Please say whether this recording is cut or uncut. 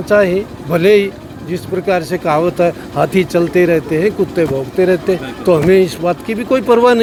uncut